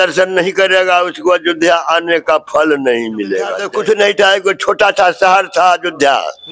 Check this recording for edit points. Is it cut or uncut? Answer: cut